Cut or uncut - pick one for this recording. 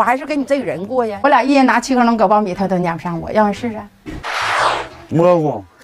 cut